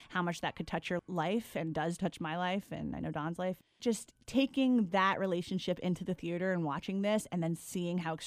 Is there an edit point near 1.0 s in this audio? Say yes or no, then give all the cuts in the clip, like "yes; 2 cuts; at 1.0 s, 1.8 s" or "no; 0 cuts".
yes; 3 cuts; at 1.0 s, 2.0 s, 3.8 s